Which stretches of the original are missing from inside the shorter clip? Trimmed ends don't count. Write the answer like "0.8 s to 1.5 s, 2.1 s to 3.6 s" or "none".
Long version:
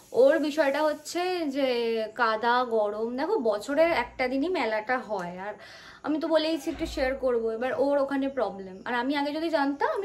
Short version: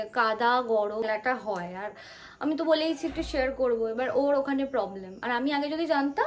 3.1 s to 4.7 s

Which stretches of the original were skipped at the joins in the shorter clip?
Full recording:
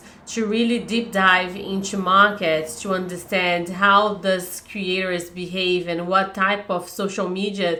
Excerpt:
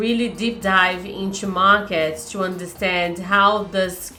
none

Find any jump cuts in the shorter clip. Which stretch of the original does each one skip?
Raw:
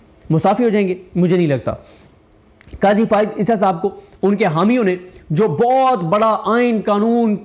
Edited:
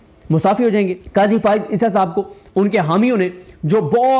1.0 s to 2.7 s

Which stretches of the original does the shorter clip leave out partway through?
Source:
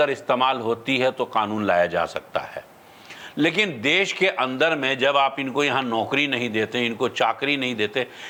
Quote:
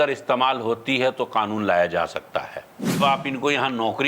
3.0 s to 5.1 s

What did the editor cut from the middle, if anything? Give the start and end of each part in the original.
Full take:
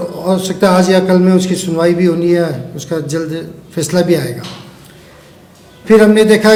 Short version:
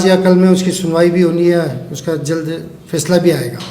none

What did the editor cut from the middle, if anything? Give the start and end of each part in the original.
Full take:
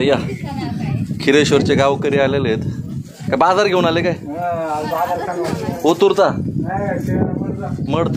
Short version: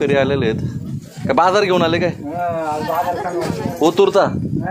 none

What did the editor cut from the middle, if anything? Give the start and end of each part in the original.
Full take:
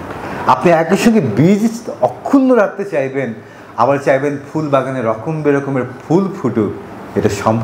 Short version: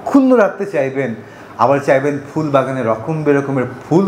none

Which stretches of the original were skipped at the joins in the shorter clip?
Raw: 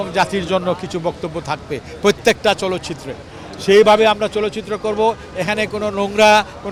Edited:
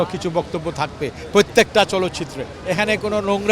3.3 s to 5.3 s

